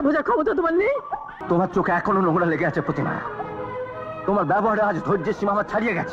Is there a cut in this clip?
yes; 1 cut; at 1.3 s

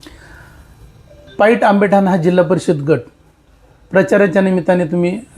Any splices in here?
no; 0 cuts

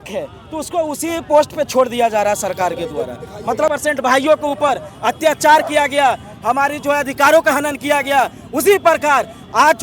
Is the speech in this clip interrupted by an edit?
yes; 1 cut; at 3.7 s

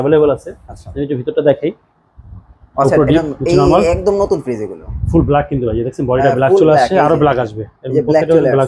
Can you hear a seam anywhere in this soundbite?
no; 0 cuts

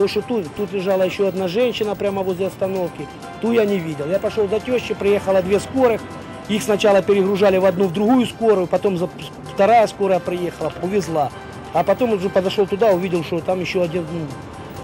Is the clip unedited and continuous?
yes; 0 cuts

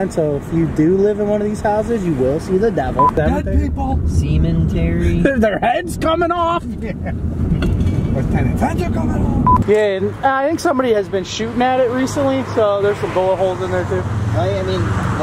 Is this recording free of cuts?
no; 2 cuts; at 3.1 s, 9.6 s

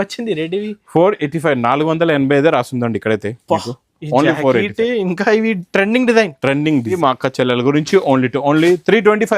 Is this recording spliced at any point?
yes; 1 cut; at 7.0 s

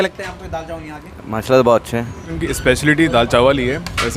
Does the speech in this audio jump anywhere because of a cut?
yes; 1 cut; at 2.2 s

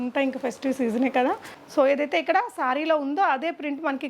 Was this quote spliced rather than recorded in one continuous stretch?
yes; 1 cut; at 1.5 s

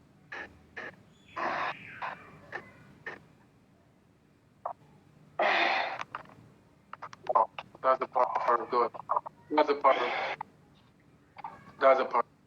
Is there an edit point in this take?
yes; 1 cut; at 4.8 s

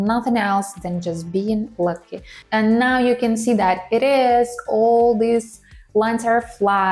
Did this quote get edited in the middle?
yes; 1 cut; at 2.4 s

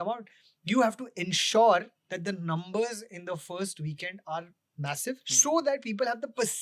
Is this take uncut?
no; 1 cut; at 5.3 s

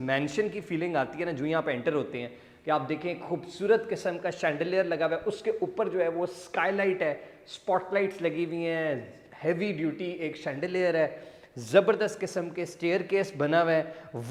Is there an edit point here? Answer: no; 0 cuts

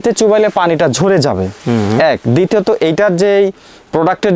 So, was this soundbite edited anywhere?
no; 0 cuts

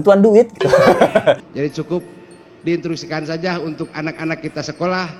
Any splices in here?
yes; 1 cut; at 1.5 s

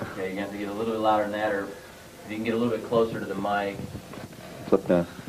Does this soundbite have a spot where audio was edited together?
yes; 1 cut; at 2.2 s

